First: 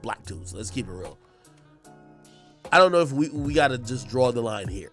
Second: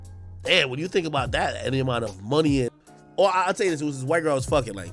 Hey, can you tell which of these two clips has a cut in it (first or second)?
second